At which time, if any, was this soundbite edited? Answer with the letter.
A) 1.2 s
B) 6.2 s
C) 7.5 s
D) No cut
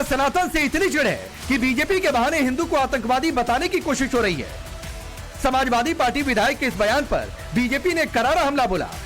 B